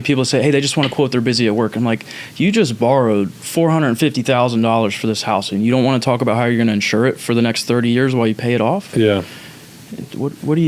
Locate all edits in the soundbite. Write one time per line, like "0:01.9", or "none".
none